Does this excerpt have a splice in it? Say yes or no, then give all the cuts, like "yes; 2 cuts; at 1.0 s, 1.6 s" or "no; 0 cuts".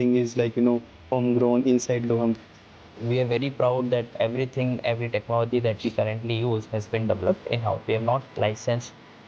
yes; 1 cut; at 2.8 s